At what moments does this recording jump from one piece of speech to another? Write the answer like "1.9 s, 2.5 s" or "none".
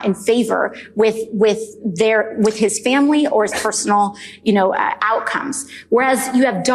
none